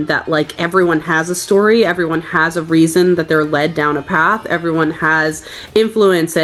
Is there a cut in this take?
no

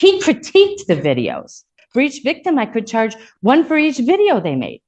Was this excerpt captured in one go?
no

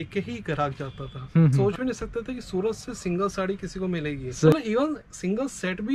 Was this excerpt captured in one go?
no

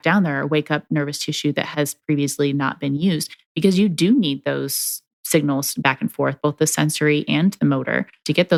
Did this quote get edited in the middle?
no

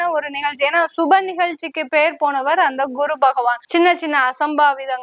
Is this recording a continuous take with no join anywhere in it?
no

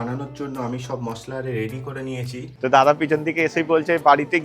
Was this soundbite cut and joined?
yes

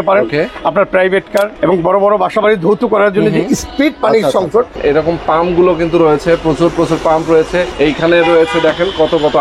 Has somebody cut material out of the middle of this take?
yes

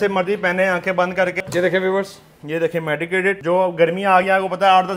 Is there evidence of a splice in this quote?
yes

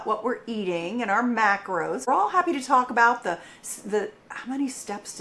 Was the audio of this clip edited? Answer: yes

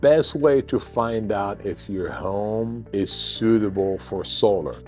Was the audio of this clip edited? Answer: no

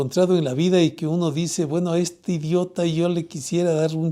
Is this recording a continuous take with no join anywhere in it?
yes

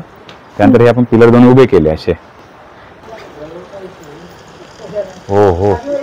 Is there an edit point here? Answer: yes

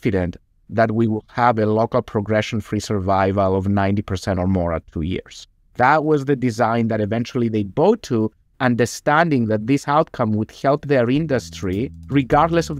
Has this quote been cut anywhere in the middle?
no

